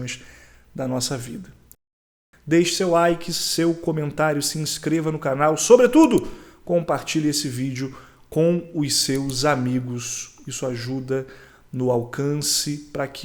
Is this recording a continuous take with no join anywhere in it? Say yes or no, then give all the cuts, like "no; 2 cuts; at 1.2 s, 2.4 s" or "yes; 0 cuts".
no; 1 cut; at 2.2 s